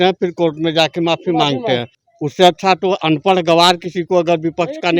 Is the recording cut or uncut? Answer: cut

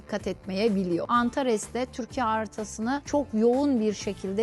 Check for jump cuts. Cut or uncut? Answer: cut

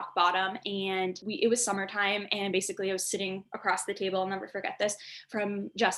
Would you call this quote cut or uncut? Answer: cut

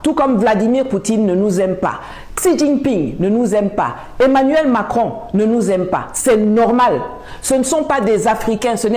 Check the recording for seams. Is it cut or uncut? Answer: uncut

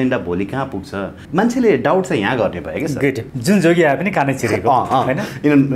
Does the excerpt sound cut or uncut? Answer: cut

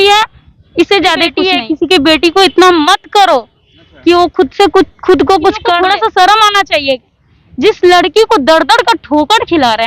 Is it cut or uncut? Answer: cut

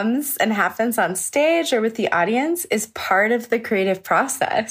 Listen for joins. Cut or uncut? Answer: uncut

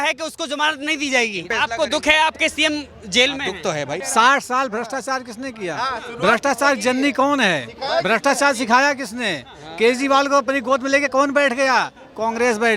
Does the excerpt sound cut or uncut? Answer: cut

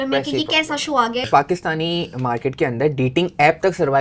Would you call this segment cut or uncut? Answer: cut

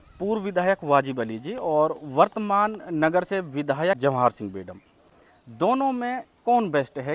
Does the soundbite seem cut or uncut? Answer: cut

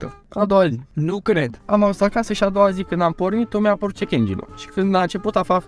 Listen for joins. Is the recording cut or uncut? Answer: cut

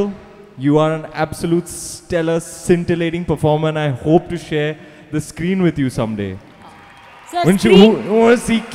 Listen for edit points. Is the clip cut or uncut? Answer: uncut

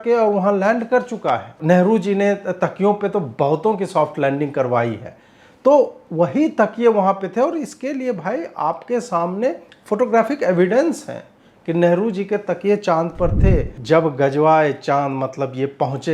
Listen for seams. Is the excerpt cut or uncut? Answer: cut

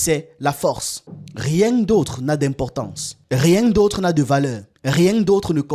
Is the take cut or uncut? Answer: cut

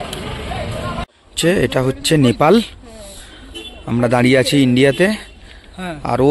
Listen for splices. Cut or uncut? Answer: cut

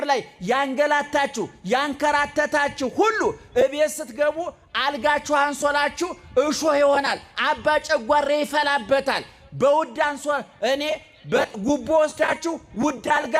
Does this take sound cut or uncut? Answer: uncut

